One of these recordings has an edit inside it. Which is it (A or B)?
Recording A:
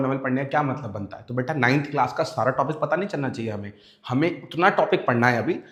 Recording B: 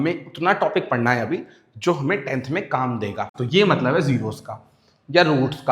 B